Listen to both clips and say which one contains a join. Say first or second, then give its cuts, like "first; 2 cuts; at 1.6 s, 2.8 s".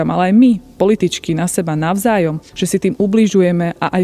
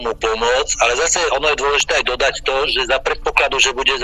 first; 1 cut; at 2.5 s